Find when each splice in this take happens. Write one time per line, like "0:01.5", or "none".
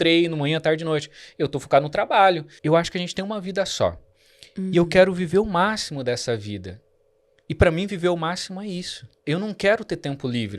0:02.5
0:09.1